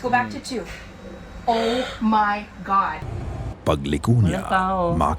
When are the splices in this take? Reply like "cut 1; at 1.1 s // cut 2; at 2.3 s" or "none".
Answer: cut 1; at 3.0 s